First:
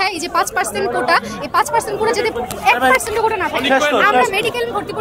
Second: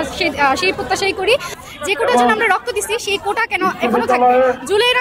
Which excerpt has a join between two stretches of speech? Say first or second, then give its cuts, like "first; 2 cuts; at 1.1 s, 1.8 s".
second; 1 cut; at 1.6 s